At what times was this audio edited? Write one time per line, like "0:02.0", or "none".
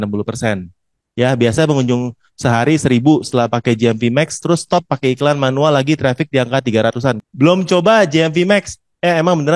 0:07.2